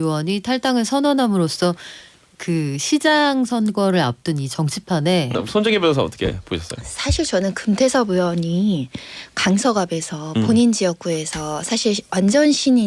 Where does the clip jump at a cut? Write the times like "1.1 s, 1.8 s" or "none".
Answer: 5.3 s